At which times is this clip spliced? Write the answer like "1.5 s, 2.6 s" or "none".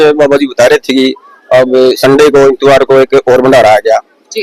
none